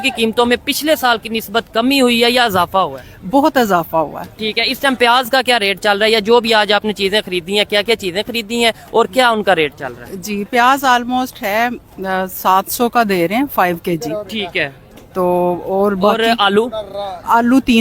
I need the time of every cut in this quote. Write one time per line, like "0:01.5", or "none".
none